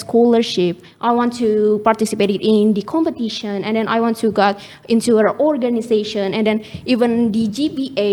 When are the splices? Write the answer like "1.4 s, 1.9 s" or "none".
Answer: none